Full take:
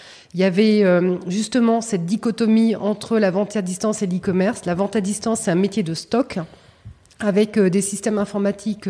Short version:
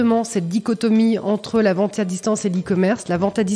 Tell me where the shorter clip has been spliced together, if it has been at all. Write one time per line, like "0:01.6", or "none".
none